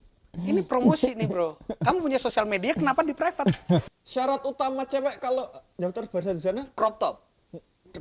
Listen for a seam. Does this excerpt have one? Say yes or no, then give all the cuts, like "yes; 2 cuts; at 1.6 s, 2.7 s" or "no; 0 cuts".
yes; 1 cut; at 3.9 s